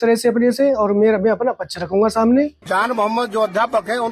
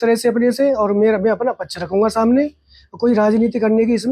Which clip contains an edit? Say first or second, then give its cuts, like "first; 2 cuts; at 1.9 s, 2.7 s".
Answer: first; 1 cut; at 2.6 s